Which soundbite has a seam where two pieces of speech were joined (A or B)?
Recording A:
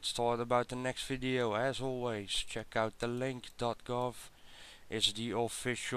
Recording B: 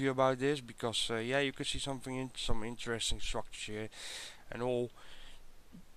B